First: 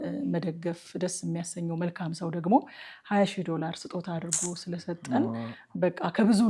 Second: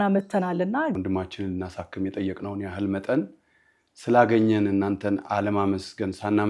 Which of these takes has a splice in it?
second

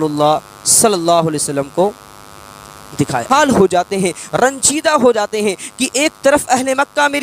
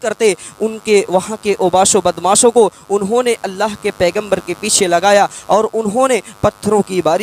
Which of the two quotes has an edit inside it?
first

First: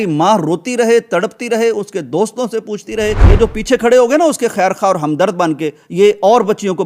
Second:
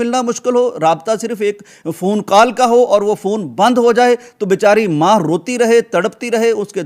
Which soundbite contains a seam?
first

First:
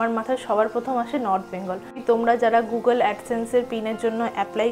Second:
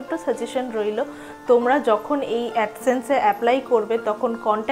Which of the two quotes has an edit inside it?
first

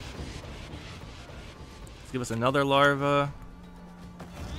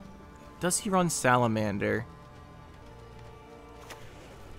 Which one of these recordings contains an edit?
second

